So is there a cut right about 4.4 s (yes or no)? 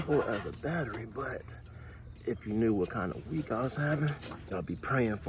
yes